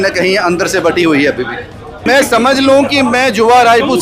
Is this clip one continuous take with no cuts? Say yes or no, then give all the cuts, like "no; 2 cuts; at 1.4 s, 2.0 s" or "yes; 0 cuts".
no; 1 cut; at 2.0 s